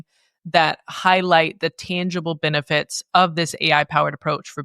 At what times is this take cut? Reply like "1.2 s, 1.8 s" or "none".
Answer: none